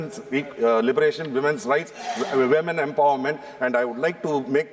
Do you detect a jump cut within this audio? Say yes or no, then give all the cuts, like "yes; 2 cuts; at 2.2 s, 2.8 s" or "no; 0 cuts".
no; 0 cuts